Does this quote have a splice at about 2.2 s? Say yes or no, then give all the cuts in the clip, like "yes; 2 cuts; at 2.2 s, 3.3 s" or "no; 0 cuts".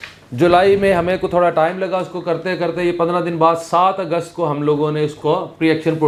no; 0 cuts